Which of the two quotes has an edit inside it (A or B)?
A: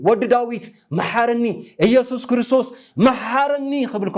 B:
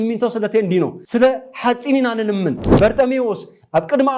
B